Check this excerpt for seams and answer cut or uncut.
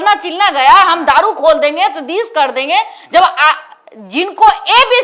uncut